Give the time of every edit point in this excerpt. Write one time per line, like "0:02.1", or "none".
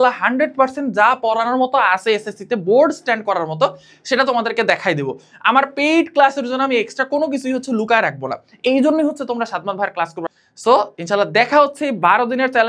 0:10.3